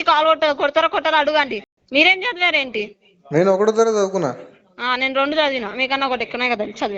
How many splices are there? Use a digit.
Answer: 1